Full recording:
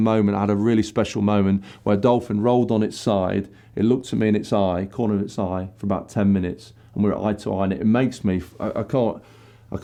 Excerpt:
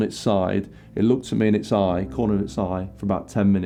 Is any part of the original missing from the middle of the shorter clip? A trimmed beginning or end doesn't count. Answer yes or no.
no